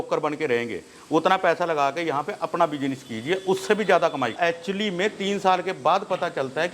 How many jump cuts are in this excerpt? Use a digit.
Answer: 1